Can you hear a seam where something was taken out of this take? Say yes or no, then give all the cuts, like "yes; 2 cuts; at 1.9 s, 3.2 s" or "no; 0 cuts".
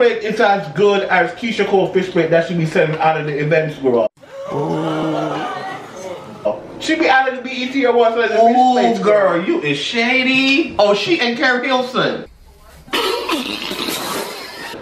no; 0 cuts